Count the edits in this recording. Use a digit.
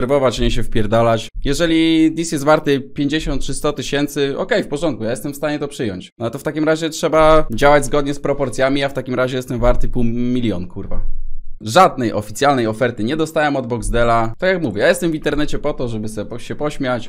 4